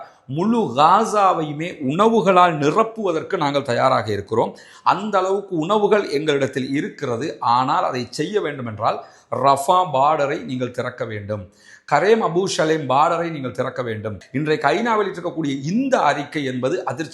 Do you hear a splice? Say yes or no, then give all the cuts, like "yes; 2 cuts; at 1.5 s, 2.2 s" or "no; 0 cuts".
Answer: yes; 1 cut; at 14.2 s